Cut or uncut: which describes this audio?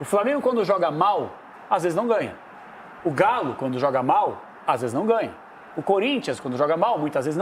uncut